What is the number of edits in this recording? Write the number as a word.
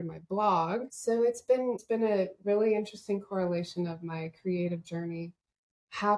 two